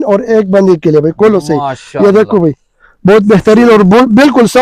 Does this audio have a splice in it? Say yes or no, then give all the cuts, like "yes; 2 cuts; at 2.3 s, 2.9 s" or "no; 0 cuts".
no; 0 cuts